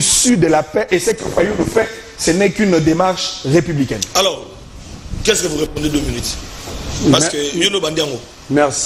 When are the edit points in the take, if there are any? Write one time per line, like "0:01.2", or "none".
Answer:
none